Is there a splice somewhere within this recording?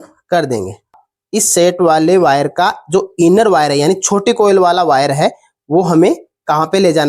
yes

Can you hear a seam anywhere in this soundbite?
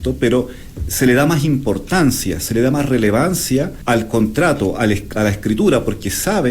yes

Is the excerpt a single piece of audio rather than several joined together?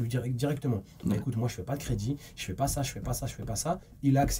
yes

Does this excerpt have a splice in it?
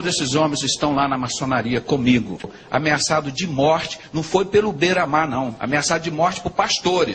yes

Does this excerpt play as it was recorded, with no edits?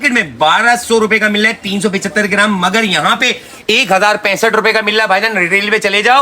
yes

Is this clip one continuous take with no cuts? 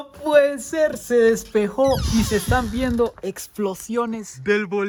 yes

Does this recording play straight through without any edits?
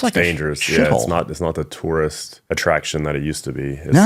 no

